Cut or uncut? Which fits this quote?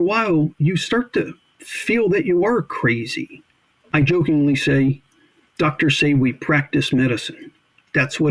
cut